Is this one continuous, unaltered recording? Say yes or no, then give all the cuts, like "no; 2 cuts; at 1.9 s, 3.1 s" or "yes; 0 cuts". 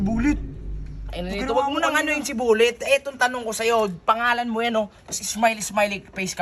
yes; 0 cuts